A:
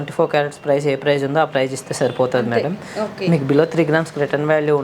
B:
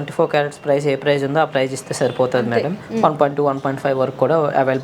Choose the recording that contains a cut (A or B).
B